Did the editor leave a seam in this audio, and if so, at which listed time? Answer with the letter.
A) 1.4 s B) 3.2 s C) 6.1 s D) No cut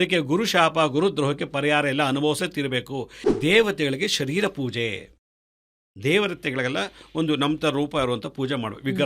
B